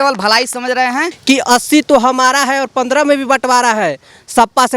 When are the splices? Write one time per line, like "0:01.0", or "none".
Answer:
0:01.1